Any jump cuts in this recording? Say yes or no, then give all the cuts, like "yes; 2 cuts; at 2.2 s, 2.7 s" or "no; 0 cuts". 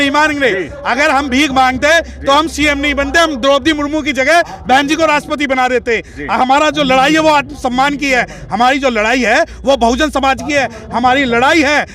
no; 0 cuts